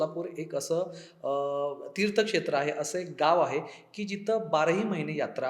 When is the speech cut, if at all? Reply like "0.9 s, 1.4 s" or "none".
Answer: none